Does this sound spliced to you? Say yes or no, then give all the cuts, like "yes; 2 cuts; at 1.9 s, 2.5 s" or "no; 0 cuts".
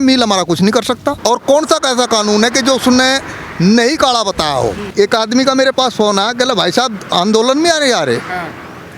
yes; 2 cuts; at 1.2 s, 4.8 s